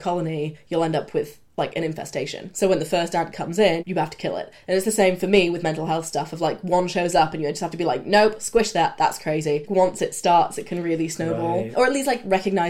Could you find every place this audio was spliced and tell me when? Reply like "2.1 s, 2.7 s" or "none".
2.5 s, 3.8 s, 9.6 s, 11.7 s